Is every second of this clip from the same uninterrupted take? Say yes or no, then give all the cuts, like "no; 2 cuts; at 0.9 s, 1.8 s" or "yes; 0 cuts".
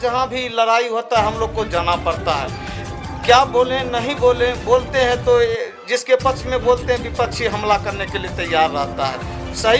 yes; 0 cuts